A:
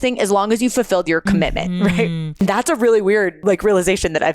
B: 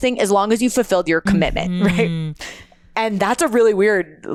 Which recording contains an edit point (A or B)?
A